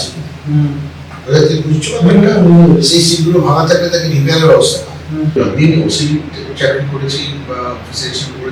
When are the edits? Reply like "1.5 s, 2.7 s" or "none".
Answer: 5.3 s